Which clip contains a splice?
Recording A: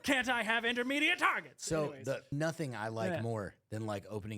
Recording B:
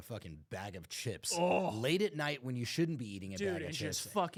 A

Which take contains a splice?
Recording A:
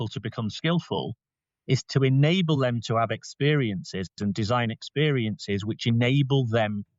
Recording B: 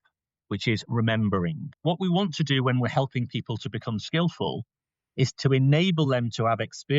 B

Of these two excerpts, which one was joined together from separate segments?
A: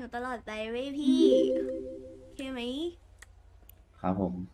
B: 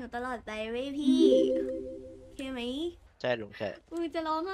B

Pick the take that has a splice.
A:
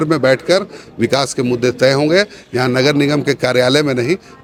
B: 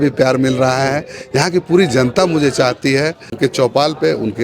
B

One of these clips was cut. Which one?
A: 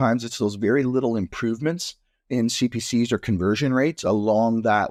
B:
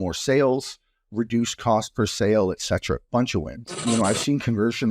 B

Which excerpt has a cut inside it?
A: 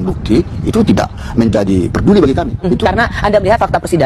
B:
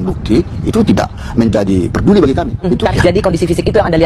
B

